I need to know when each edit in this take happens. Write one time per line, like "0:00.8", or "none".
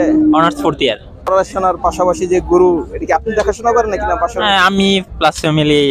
0:01.3